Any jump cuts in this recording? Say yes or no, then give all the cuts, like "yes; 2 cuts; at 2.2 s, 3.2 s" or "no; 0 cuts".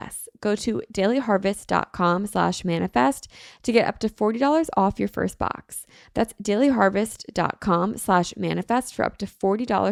no; 0 cuts